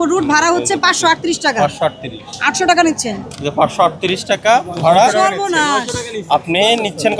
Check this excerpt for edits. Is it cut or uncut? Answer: uncut